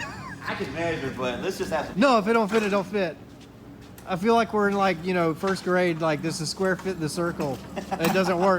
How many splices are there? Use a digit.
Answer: 0